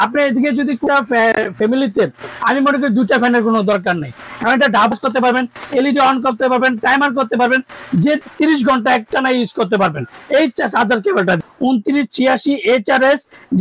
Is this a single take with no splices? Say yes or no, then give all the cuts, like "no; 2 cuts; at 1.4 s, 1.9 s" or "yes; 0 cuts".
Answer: no; 4 cuts; at 0.8 s, 4.9 s, 8.2 s, 11.5 s